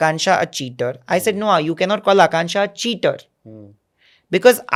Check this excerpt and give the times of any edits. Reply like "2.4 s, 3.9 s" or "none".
none

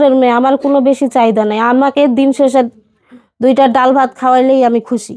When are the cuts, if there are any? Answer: none

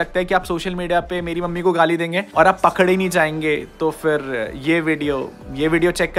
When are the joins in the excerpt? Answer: 2.2 s

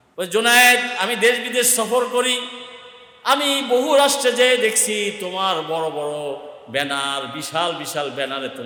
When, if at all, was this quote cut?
none

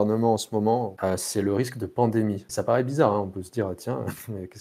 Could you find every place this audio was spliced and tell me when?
0.9 s, 2.4 s

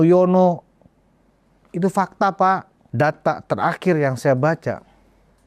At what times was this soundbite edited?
2.8 s

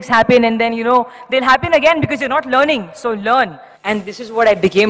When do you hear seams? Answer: 3.7 s

